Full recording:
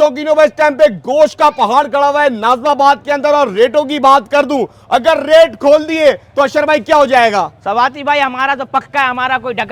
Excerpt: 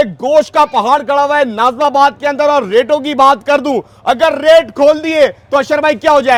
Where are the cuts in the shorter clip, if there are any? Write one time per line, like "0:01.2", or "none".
none